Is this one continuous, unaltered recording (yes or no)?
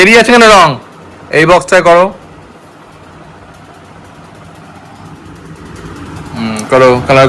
yes